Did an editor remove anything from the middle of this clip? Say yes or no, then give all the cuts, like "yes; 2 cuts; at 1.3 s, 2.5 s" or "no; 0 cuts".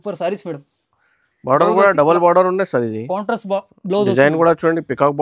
no; 0 cuts